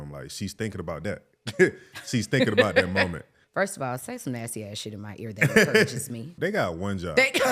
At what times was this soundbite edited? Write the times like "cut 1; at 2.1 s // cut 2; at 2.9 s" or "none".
cut 1; at 3.4 s // cut 2; at 6.3 s